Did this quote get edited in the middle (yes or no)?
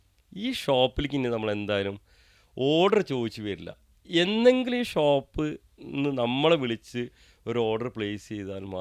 no